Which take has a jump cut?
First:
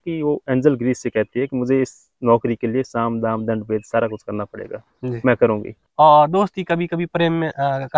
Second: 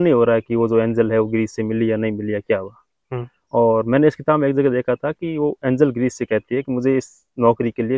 first; 1 cut; at 5.8 s

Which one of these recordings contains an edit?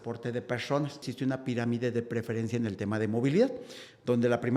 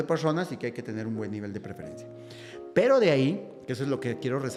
first; 1 cut; at 1.1 s

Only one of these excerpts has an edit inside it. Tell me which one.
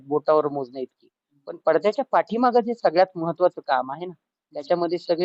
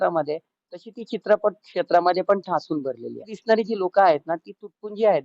second; 1 cut; at 3.3 s

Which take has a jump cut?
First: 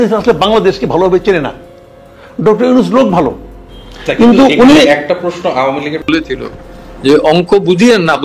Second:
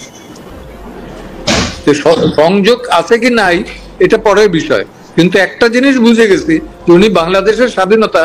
first; 1 cut; at 6.0 s

